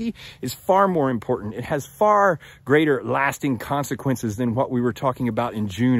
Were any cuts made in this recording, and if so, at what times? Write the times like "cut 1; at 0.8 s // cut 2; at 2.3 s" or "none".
none